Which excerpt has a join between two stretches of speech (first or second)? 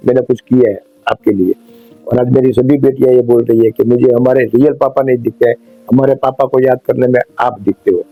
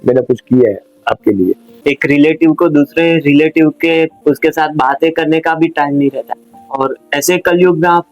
second